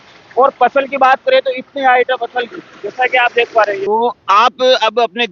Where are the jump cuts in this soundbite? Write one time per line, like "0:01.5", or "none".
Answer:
0:03.8